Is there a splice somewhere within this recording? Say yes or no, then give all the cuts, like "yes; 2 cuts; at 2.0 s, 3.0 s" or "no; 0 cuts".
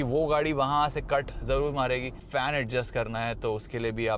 yes; 1 cut; at 2.2 s